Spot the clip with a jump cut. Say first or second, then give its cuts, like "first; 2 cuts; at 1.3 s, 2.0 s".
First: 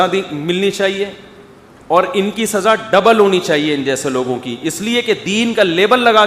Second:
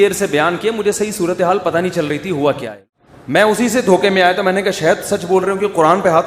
second; 1 cut; at 2.7 s